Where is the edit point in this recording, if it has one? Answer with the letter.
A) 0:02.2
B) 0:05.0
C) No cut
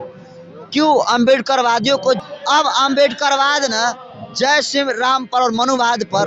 A